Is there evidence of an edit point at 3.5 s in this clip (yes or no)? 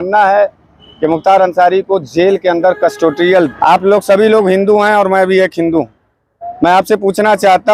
yes